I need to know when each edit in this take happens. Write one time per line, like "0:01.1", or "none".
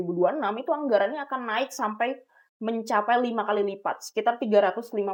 none